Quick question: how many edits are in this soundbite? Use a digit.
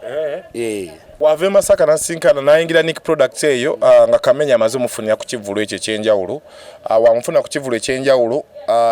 1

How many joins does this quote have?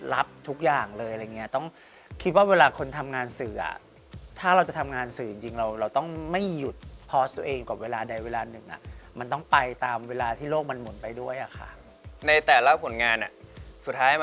1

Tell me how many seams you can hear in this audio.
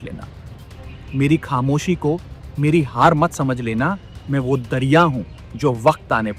0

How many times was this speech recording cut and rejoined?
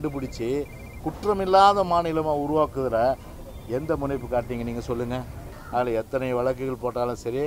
1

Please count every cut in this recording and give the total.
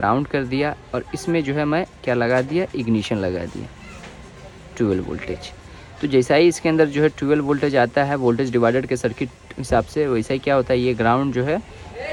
0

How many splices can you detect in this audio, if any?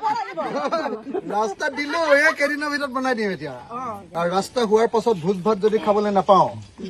1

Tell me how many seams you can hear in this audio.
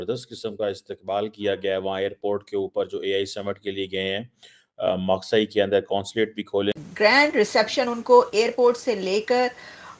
1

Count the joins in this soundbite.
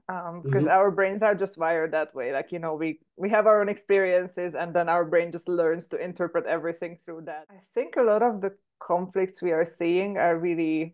1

